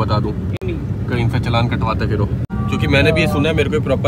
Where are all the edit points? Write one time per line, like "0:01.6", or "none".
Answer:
none